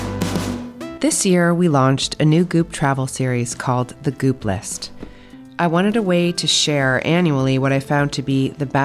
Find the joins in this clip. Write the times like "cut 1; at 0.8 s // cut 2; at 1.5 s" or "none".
cut 1; at 0.9 s